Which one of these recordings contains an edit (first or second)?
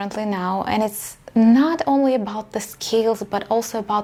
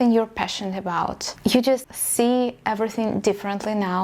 second